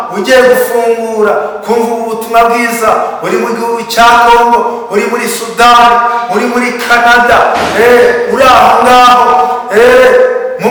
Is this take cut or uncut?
uncut